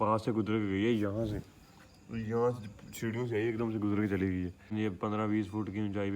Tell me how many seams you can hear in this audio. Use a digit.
1